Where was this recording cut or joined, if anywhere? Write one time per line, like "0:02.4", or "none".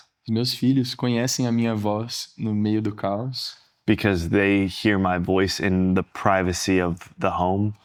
none